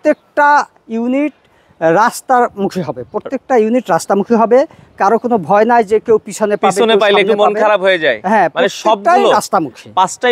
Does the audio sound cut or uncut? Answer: uncut